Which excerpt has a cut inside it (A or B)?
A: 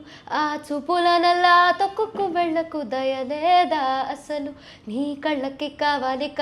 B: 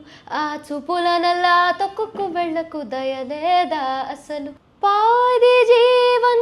B